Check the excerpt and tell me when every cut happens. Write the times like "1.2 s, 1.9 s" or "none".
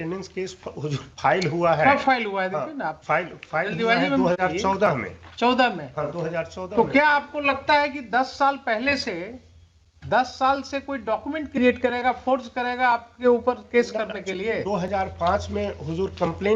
none